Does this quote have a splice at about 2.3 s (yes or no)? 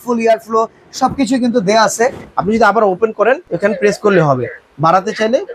yes